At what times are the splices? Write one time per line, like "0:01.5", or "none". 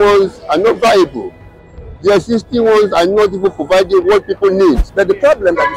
0:04.9